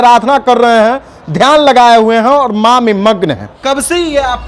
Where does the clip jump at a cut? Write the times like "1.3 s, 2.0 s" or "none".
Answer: 3.5 s